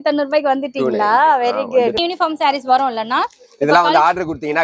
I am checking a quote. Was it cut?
yes; 1 cut; at 2.0 s

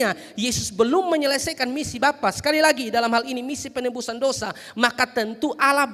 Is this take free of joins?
yes; 0 cuts

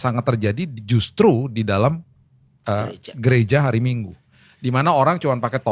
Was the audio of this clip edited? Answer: no; 0 cuts

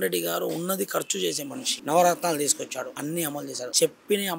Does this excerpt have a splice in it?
yes; 2 cuts; at 1.7 s, 3.4 s

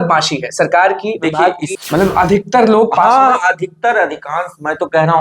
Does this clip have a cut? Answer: yes; 1 cut; at 1.7 s

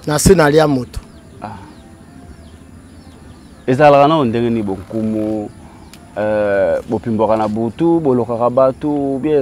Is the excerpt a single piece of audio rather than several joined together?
yes; 0 cuts

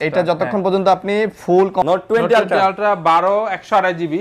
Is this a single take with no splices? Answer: no; 1 cut; at 1.9 s

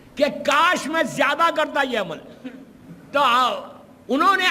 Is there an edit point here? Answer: yes; 1 cut; at 2.8 s

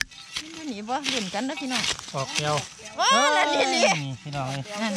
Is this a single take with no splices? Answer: yes; 0 cuts

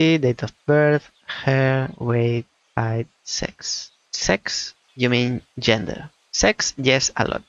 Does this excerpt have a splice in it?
no; 0 cuts

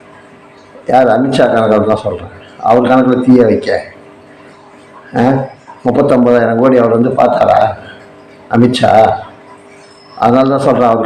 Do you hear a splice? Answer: no; 0 cuts

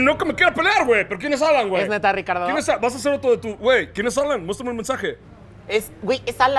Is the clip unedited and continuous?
no; 1 cut; at 5.2 s

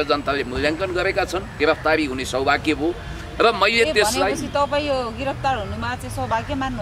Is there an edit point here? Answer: yes; 1 cut; at 1.6 s

